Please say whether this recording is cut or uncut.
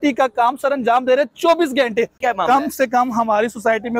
cut